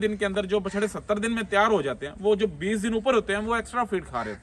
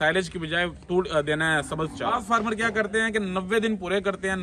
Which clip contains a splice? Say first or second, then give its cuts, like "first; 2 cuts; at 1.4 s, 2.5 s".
second; 1 cut; at 2.2 s